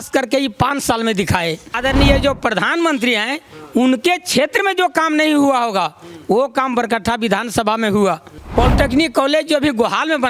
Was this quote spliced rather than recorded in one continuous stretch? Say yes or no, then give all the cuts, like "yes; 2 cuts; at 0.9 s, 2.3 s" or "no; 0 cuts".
yes; 2 cuts; at 1.8 s, 8.3 s